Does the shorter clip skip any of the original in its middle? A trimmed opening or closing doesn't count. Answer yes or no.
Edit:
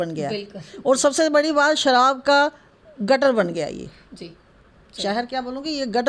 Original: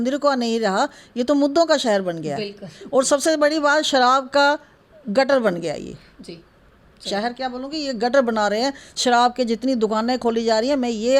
no